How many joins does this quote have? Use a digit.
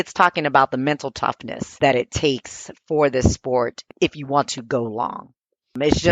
1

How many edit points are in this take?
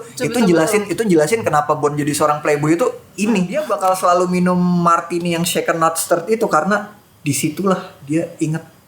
1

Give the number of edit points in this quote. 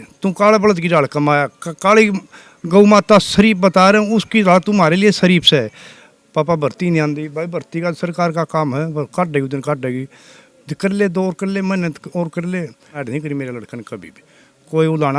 2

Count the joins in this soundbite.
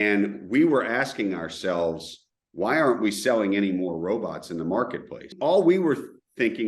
1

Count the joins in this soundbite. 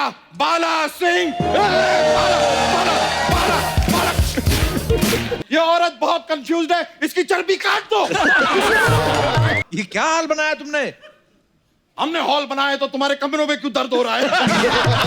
2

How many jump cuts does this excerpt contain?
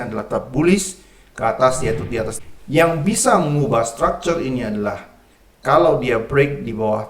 1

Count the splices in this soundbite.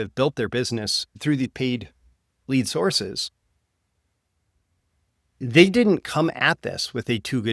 1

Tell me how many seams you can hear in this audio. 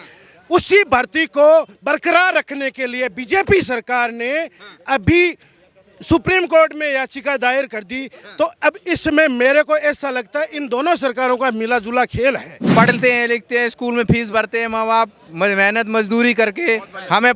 1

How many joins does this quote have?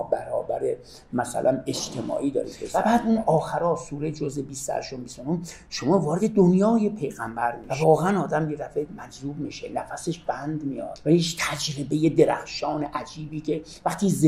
3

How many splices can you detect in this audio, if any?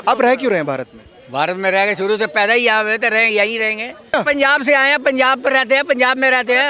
1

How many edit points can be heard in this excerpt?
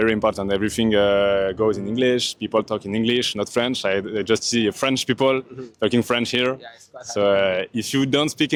0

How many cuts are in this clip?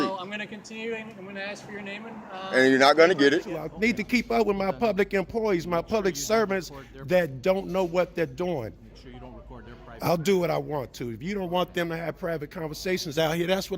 1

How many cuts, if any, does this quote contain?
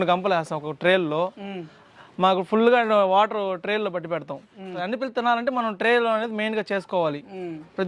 1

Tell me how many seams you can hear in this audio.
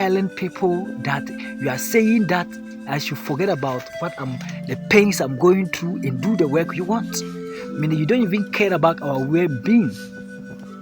1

